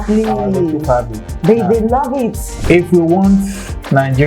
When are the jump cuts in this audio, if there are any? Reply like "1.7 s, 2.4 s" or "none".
2.5 s